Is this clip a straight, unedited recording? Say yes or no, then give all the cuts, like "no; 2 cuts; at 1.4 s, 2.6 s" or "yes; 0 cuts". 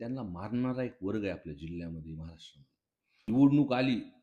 no; 1 cut; at 3.3 s